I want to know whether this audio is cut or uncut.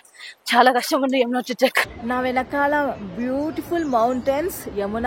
cut